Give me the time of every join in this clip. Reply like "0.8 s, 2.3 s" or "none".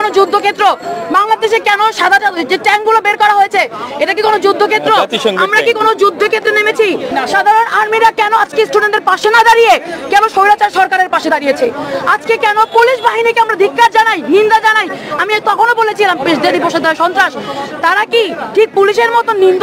7.1 s